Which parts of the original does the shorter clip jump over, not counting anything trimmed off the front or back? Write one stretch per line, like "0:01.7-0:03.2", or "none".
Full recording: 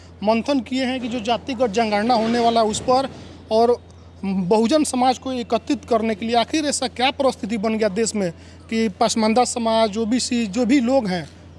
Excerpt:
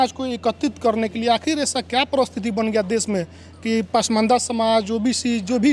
none